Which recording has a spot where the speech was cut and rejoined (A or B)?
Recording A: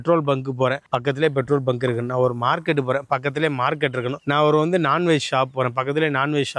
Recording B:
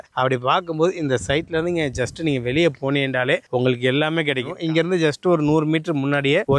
B